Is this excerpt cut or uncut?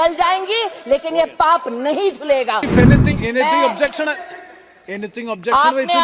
cut